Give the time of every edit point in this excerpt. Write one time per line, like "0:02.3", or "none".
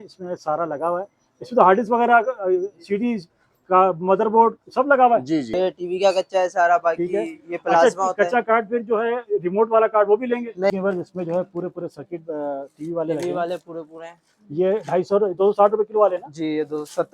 0:05.5
0:10.7